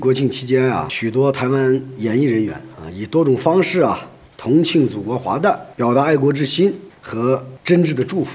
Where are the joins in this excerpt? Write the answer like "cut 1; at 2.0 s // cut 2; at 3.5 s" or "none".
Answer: cut 1; at 0.9 s // cut 2; at 5.7 s